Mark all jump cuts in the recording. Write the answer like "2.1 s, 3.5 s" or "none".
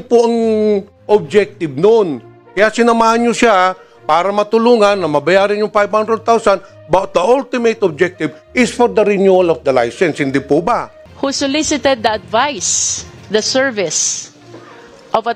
11.0 s